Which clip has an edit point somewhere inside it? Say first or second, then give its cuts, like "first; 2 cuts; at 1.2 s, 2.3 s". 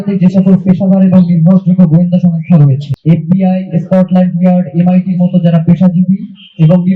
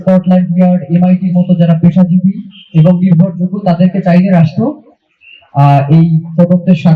first; 1 cut; at 2.9 s